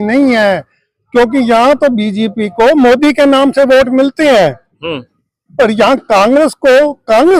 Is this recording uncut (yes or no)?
yes